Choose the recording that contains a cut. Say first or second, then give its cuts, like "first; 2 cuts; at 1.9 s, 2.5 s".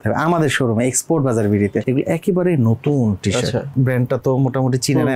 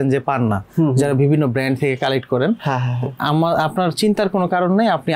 first; 2 cuts; at 1.8 s, 3.7 s